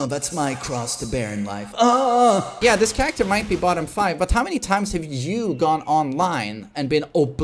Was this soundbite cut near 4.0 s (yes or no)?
no